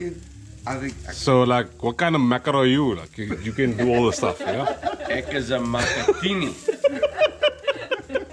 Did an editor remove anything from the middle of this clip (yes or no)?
no